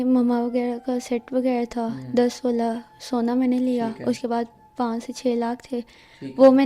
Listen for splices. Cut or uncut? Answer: uncut